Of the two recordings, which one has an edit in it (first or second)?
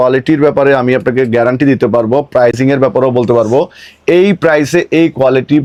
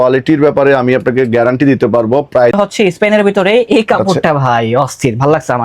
second